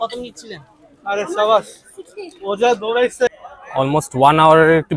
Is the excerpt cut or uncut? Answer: cut